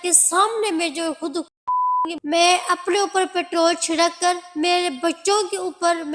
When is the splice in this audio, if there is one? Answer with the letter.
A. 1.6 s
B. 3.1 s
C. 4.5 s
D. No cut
D